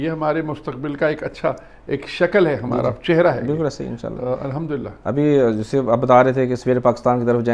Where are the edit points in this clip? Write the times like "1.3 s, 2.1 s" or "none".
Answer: none